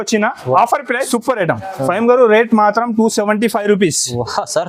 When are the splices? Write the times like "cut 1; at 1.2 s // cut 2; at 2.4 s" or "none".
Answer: cut 1; at 1.0 s